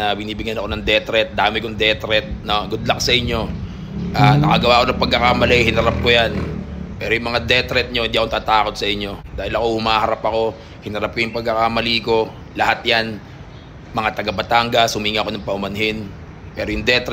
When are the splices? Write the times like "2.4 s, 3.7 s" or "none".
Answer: none